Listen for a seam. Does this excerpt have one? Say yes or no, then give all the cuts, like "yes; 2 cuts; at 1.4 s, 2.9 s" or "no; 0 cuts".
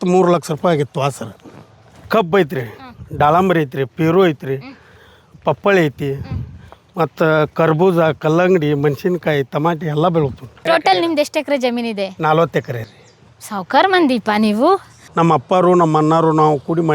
yes; 3 cuts; at 2.0 s, 10.7 s, 15.0 s